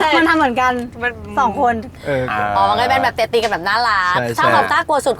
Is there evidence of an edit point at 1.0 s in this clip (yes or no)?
no